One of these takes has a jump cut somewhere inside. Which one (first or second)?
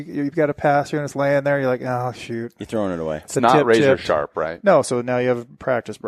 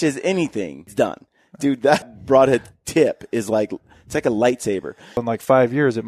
second